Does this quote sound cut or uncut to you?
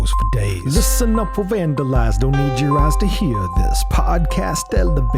uncut